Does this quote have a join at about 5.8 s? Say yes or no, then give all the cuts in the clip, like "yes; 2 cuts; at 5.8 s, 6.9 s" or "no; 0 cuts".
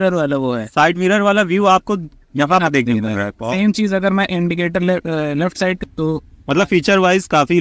yes; 1 cut; at 5.8 s